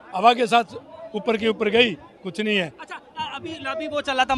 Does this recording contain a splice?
no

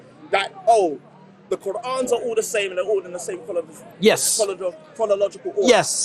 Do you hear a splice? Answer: no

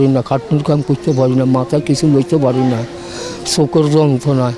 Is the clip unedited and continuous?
yes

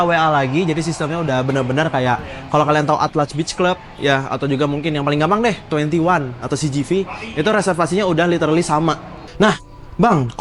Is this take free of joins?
no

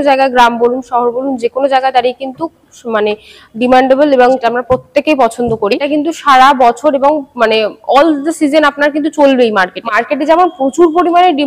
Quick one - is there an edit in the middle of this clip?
yes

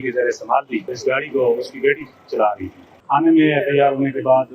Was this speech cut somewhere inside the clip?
yes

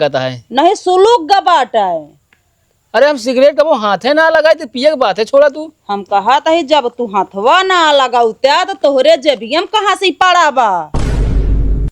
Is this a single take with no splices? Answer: no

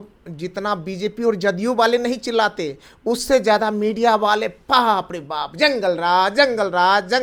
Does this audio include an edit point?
no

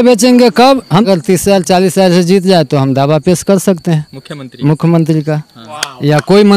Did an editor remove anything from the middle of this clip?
yes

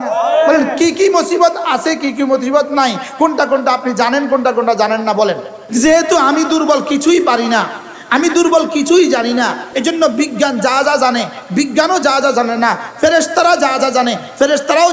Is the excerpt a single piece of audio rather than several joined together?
no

